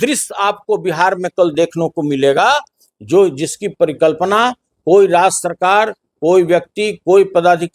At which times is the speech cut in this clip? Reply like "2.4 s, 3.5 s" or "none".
none